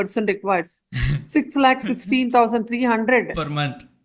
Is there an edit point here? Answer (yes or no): no